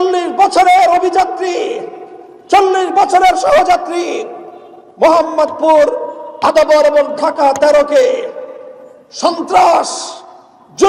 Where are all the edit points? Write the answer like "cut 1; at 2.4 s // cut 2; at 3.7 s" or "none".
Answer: none